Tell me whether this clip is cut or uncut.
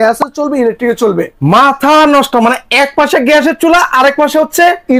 uncut